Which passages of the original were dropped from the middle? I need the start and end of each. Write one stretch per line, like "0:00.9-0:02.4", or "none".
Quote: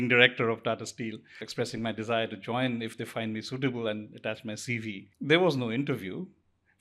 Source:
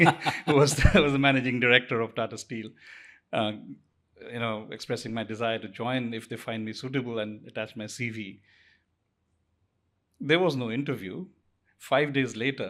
0:02.9-0:04.7
0:08.4-0:10.1